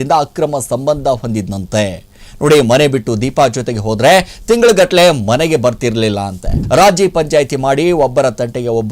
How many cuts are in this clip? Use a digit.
1